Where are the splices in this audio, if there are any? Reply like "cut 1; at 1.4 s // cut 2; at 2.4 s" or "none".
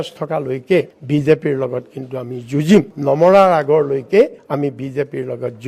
none

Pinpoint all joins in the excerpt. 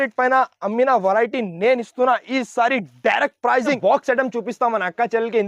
cut 1; at 3.8 s

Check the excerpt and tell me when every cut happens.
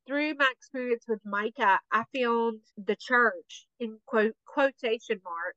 cut 1; at 2.7 s

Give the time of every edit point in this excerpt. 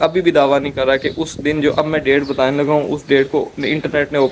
none

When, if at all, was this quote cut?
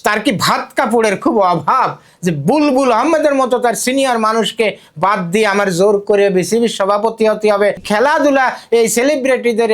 cut 1; at 7.8 s

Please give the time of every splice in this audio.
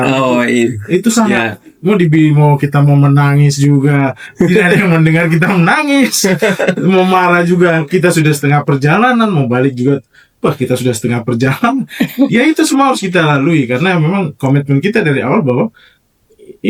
none

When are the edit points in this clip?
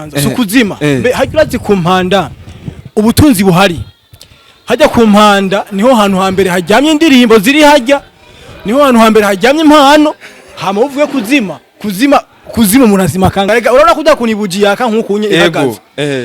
cut 1; at 13.5 s

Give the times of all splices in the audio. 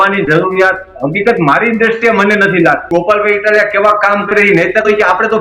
cut 1; at 2.8 s

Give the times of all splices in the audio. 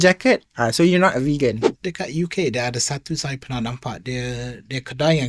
cut 1; at 1.7 s

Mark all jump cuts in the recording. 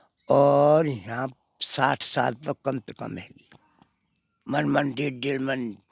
none

